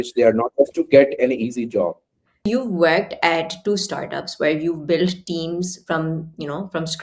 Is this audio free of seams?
no; 1 cut; at 2.4 s

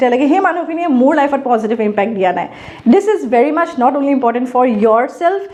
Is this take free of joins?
yes; 0 cuts

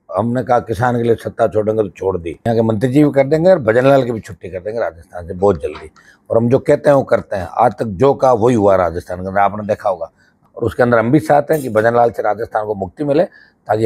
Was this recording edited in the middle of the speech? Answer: yes; 2 cuts; at 2.3 s, 10.4 s

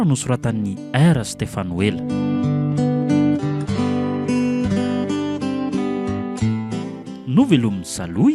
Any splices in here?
yes; 1 cut; at 2.0 s

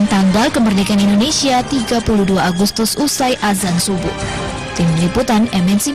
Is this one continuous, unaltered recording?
no; 1 cut; at 1.4 s

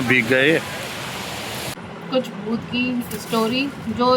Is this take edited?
yes; 1 cut; at 1.8 s

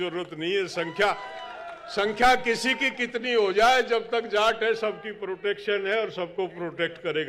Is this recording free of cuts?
yes; 0 cuts

